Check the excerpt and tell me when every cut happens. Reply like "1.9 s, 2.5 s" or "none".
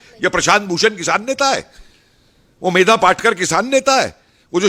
none